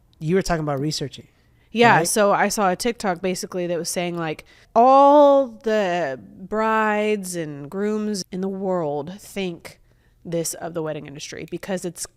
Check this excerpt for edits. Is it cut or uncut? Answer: cut